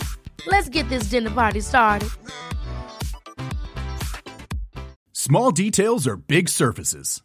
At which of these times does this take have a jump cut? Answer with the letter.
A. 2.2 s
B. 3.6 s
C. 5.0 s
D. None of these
C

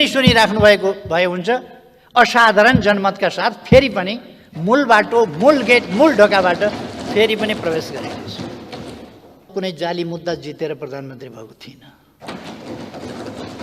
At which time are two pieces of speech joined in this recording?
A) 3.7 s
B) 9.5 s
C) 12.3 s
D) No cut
B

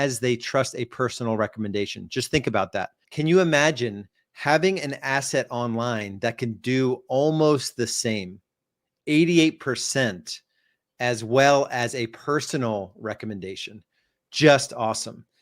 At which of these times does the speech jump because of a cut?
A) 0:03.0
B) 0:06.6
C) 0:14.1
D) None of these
A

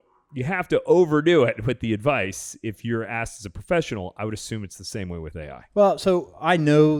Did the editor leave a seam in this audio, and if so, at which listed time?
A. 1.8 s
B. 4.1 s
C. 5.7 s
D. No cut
D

